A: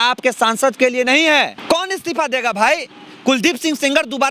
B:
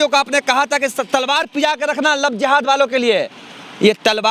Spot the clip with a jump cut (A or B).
A